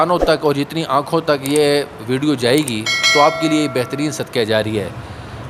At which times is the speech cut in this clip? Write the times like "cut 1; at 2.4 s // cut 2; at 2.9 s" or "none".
none